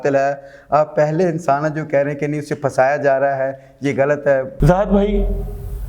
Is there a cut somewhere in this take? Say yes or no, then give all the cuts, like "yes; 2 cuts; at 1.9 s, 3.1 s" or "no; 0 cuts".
yes; 1 cut; at 4.5 s